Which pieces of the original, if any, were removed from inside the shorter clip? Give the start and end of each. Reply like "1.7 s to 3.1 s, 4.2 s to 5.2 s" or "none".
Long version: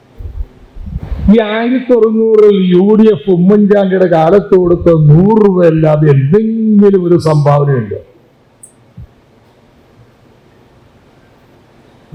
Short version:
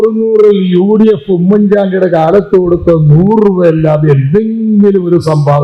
none